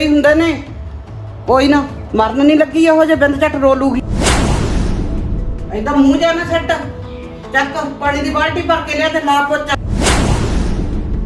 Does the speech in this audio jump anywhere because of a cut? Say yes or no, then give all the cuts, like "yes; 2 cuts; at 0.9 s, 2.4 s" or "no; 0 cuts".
yes; 3 cuts; at 4.1 s, 5.3 s, 9.8 s